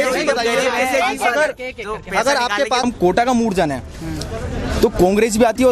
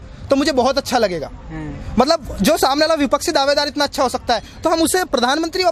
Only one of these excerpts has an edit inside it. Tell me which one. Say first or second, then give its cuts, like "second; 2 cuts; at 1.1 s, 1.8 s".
first; 1 cut; at 2.8 s